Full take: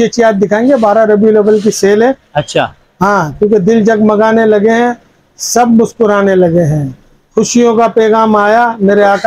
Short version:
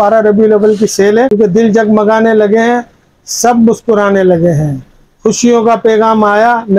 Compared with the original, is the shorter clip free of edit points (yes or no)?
no